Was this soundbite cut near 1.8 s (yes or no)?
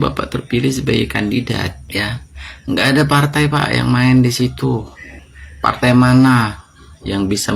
yes